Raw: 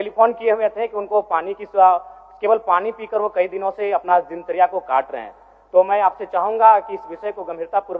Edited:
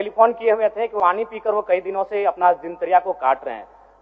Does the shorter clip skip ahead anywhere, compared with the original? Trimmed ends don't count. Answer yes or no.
yes